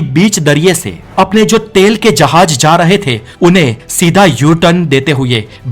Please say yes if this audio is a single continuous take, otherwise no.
yes